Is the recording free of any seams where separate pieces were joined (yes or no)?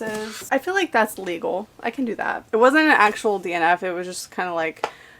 no